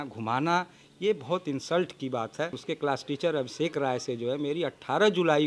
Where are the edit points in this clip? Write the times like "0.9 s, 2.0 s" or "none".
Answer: 2.6 s